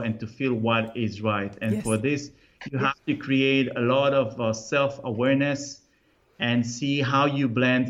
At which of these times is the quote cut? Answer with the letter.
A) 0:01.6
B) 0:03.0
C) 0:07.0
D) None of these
D